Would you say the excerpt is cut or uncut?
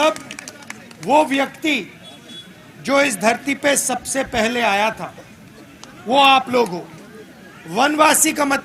uncut